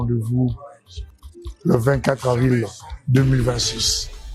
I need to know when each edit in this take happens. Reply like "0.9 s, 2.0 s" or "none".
none

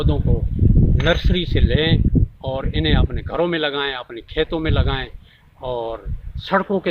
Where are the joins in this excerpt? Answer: none

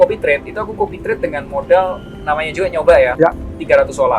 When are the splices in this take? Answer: none

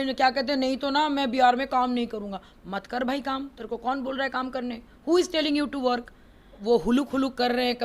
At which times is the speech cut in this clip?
6.6 s

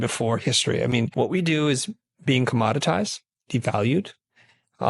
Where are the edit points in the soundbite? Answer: 1.1 s

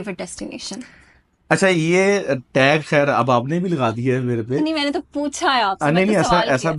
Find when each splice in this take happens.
none

